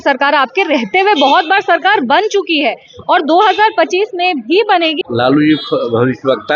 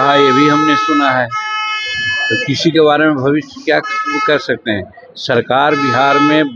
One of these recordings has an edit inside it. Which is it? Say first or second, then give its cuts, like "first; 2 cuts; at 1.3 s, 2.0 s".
first; 1 cut; at 5.0 s